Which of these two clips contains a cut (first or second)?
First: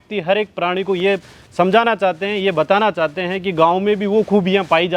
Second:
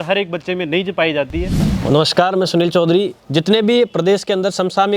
second